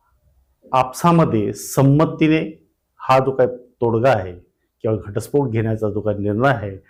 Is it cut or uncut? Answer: uncut